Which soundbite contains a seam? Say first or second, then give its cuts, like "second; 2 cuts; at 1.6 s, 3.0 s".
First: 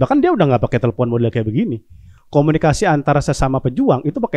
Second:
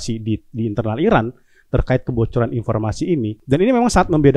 second; 1 cut; at 3.4 s